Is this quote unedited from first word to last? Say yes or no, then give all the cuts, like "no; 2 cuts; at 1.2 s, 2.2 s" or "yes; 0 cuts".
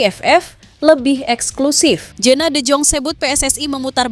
no; 1 cut; at 2.1 s